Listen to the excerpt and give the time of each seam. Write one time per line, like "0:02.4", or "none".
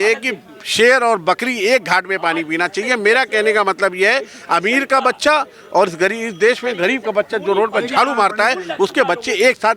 none